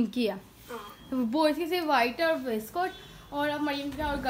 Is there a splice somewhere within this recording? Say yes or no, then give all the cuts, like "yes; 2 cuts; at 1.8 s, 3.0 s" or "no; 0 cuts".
no; 0 cuts